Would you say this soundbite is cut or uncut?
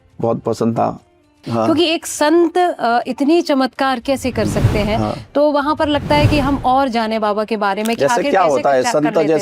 cut